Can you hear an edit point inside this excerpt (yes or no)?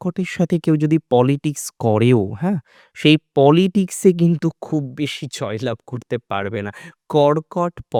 no